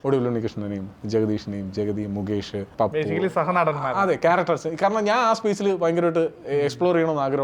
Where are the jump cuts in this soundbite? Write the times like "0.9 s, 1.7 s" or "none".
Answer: 2.7 s